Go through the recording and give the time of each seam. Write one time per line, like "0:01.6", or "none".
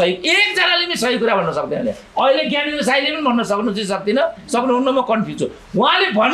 none